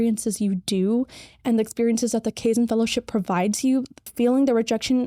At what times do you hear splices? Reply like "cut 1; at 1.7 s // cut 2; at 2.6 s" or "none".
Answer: cut 1; at 4.1 s